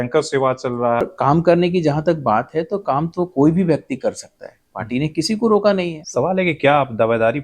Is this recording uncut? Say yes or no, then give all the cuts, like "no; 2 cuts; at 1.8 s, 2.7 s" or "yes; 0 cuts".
no; 2 cuts; at 1.0 s, 6.0 s